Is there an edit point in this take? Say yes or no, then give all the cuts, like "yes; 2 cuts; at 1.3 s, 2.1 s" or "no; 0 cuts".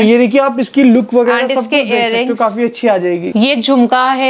no; 0 cuts